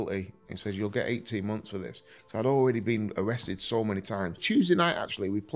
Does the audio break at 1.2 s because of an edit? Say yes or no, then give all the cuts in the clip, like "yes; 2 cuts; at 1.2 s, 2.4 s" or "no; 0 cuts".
no; 1 cut; at 4.4 s